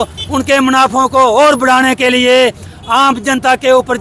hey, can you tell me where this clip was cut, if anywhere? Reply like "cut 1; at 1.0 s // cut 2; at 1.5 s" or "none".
none